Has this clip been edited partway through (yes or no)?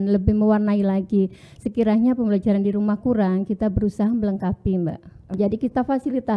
yes